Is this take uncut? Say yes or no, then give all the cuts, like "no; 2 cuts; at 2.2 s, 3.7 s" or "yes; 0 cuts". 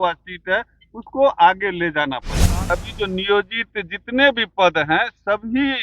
no; 1 cut; at 2.6 s